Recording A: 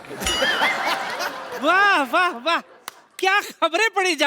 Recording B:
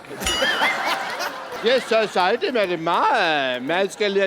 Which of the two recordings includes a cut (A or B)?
B